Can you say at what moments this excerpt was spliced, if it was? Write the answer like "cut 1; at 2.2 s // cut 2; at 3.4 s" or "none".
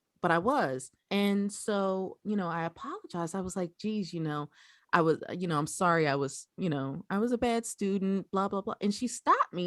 cut 1; at 0.9 s